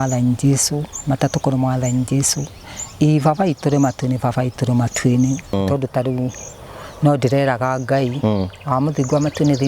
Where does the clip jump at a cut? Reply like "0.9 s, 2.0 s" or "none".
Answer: 5.5 s

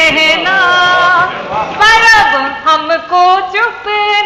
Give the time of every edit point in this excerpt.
none

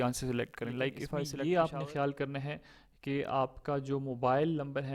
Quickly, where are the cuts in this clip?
1.0 s

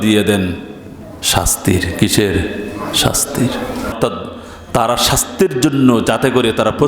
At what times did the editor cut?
3.9 s

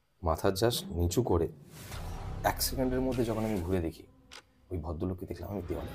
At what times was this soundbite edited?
none

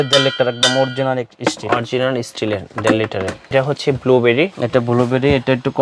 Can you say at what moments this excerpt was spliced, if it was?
3.5 s

